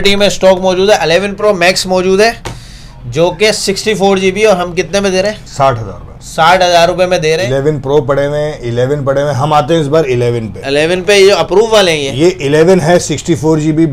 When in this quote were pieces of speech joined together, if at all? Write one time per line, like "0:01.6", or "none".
0:01.4
0:07.4